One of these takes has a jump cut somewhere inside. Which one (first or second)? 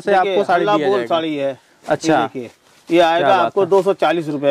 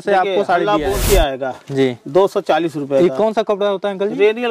second